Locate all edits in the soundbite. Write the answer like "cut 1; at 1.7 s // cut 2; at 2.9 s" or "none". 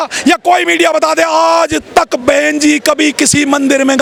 none